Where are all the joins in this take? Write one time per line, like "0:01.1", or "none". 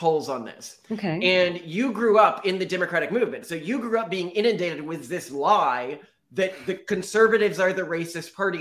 none